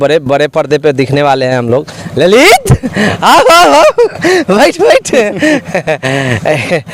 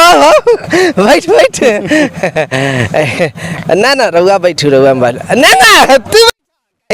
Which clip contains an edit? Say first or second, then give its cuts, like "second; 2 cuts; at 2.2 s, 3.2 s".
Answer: first; 1 cut; at 2.0 s